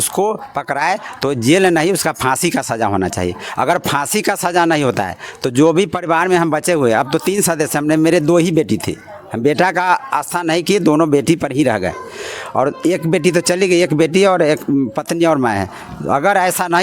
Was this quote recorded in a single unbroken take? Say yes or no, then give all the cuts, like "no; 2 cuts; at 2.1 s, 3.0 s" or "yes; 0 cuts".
yes; 0 cuts